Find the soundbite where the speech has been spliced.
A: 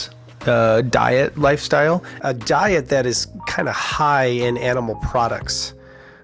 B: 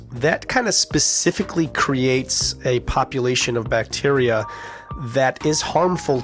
A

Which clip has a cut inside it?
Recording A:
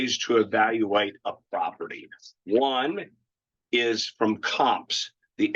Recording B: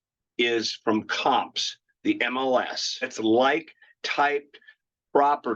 B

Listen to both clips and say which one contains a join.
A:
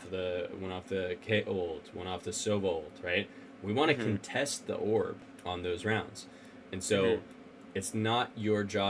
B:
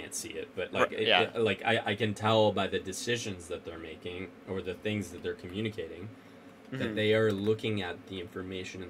A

